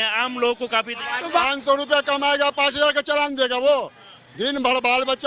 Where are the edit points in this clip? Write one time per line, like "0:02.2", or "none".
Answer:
0:01.4